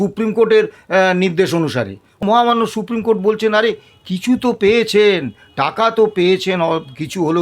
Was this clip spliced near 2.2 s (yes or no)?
yes